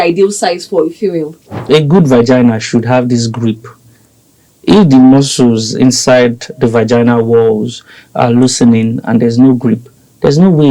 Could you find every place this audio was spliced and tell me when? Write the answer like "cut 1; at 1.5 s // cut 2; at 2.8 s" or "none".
cut 1; at 1.7 s